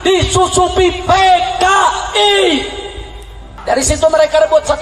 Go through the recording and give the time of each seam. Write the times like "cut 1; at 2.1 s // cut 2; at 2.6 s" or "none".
cut 1; at 3.5 s